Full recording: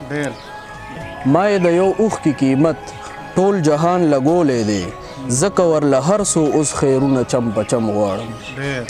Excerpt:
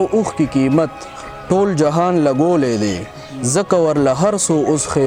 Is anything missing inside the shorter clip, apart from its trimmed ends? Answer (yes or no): no